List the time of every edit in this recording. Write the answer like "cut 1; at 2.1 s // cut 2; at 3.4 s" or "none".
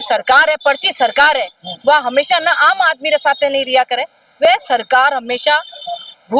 none